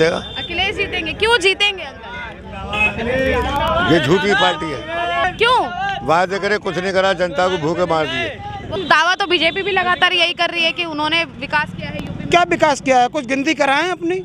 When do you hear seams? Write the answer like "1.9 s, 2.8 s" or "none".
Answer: 5.2 s, 8.7 s